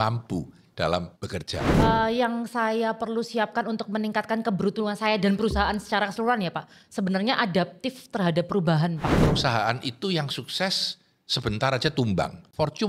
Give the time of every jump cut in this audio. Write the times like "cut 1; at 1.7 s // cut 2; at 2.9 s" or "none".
cut 1; at 1.5 s // cut 2; at 9.1 s